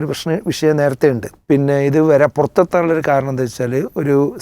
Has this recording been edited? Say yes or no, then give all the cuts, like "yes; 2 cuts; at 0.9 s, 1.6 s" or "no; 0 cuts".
yes; 1 cut; at 1.3 s